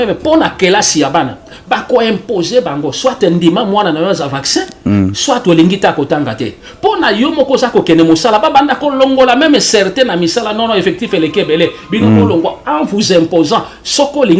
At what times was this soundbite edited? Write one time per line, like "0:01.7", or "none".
none

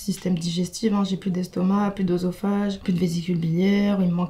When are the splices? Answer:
0:02.8

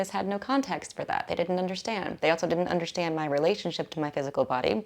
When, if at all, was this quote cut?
0:02.1

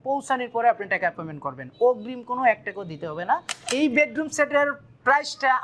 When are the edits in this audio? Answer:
0:03.6

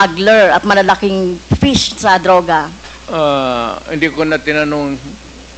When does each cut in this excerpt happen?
none

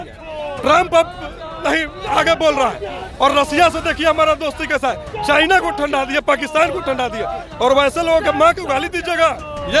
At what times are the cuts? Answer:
none

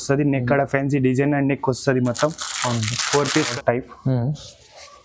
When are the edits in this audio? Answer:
0:03.5

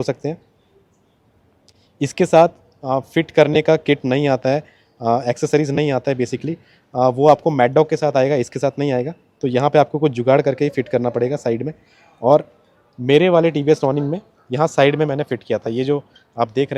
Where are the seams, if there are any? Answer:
none

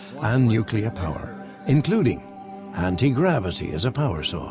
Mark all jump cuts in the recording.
0:01.9

